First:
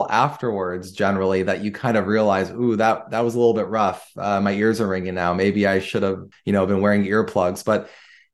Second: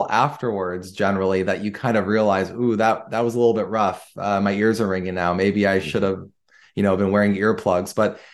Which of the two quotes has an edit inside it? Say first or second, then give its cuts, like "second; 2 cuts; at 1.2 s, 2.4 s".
first; 1 cut; at 6.3 s